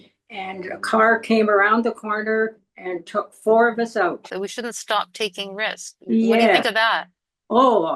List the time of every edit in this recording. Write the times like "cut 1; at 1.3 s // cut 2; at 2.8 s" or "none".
cut 1; at 4.3 s